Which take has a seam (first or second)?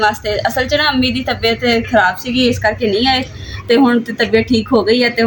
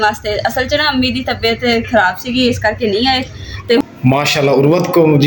second